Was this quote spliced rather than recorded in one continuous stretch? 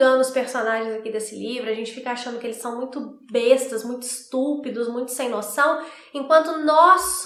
no; 0 cuts

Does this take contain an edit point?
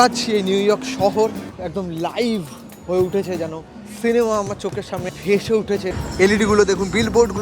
yes; 3 cuts; at 1.5 s, 5.2 s, 6.0 s

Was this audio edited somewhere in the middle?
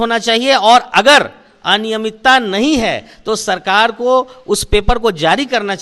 no; 0 cuts

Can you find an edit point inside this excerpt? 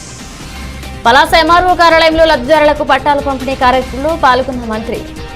yes; 1 cut; at 1.0 s

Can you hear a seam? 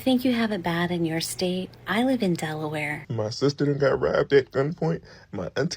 yes; 2 cuts; at 1.8 s, 3.1 s

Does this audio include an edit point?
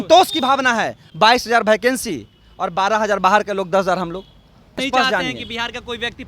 yes; 2 cuts; at 1.0 s, 4.9 s

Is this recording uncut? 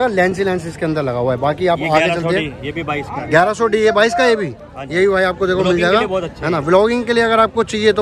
yes; 0 cuts

